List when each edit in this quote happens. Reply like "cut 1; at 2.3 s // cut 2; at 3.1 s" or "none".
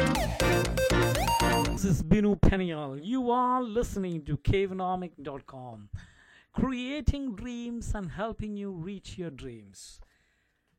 cut 1; at 1.7 s